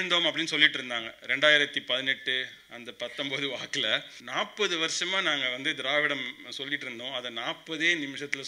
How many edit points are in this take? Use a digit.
1